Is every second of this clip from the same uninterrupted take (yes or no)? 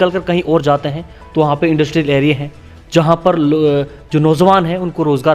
yes